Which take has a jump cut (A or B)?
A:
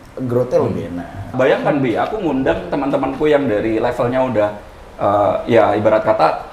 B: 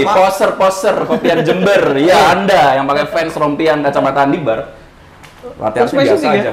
A